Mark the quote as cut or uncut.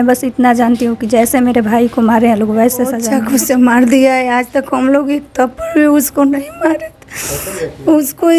cut